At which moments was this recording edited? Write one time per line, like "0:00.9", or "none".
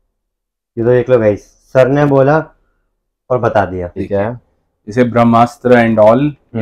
0:04.0